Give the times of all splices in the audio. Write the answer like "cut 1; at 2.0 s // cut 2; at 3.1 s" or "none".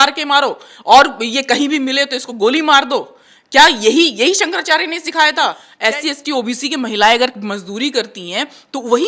cut 1; at 5.7 s

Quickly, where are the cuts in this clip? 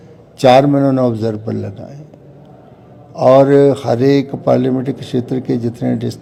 none

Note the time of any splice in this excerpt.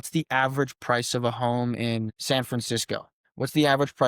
cut 1; at 2.2 s // cut 2; at 3.2 s

